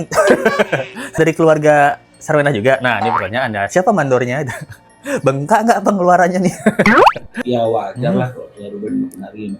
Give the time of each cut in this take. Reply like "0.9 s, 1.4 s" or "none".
7.3 s